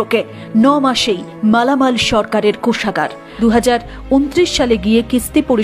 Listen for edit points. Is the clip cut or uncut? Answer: cut